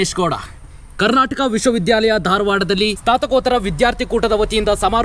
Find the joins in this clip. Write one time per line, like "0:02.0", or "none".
0:03.0

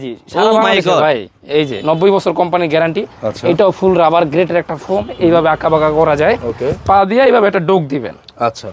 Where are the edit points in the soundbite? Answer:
0:01.8
0:06.7

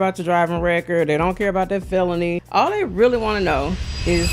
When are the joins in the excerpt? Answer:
0:02.4

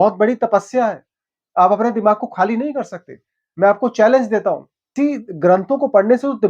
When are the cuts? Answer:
0:04.9

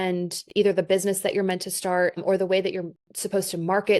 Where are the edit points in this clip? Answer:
0:02.2

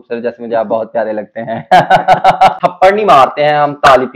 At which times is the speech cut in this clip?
0:02.6

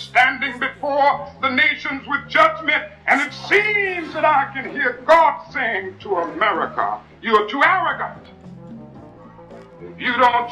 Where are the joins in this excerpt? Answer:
none

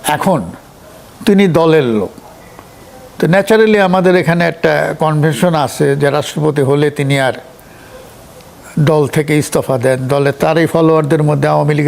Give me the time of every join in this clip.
0:10.4

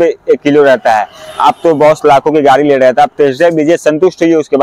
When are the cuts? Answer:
none

